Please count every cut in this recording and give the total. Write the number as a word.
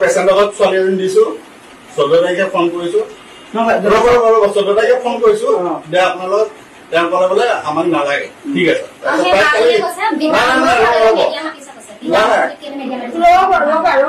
zero